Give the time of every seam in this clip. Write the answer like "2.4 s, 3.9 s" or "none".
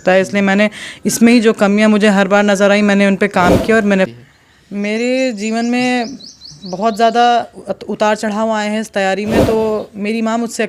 4.1 s